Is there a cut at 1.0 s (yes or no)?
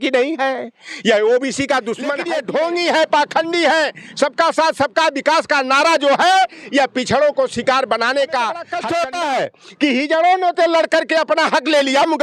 no